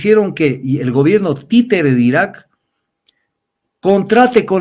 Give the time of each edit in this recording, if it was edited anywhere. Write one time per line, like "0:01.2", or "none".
none